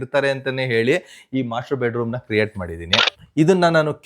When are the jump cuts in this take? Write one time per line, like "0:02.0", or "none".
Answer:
0:03.0